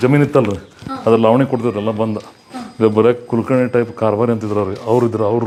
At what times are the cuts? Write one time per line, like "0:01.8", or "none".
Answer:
none